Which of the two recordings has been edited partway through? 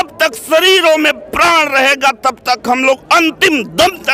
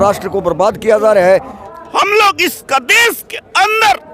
second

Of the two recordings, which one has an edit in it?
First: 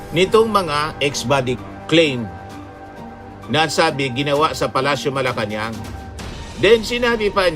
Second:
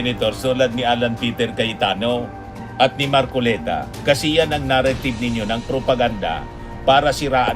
first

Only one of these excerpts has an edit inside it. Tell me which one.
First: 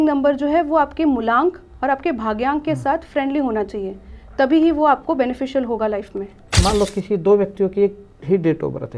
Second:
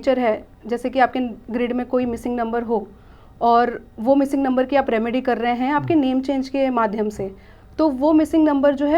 first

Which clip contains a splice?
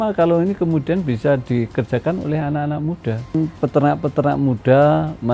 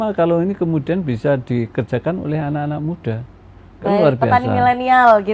first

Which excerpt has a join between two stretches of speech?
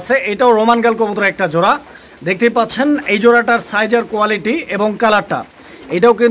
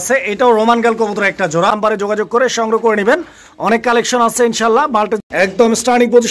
second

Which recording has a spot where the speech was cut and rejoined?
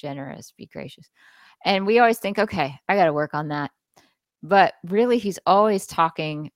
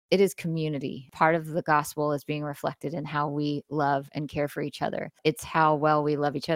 second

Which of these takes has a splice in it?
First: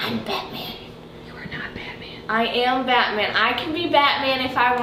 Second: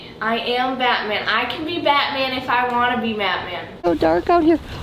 second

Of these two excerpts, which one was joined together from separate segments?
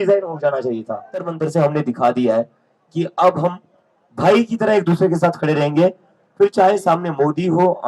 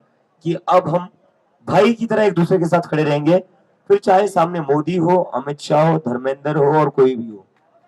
first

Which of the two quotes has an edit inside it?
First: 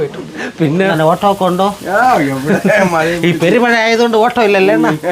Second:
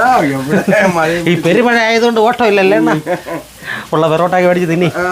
first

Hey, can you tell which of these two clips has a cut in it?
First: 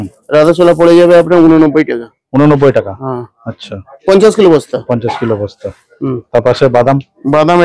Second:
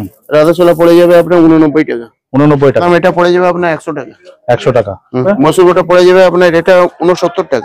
second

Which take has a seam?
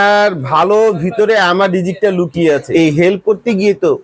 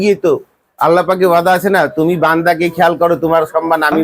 first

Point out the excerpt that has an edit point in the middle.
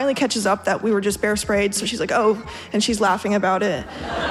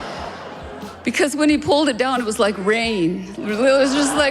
second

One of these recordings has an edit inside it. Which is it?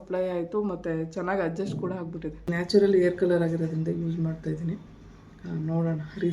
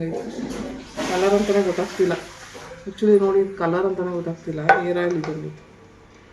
first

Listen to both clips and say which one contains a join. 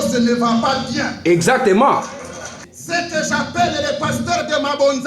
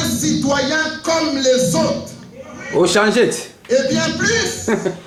first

